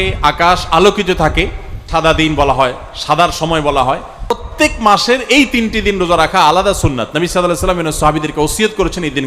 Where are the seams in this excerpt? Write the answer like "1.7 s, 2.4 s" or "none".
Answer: 1.7 s, 4.4 s

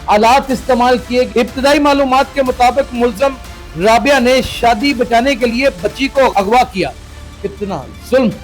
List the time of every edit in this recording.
1.3 s

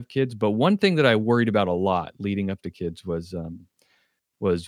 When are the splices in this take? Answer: none

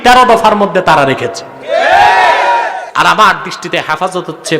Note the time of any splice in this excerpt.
2.8 s

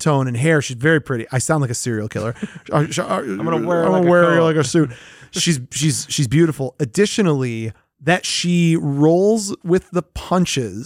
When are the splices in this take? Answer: none

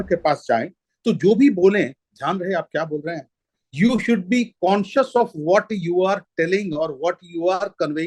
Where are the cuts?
none

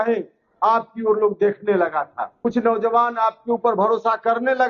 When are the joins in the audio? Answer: 2.2 s

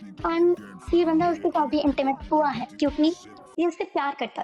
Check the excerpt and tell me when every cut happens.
none

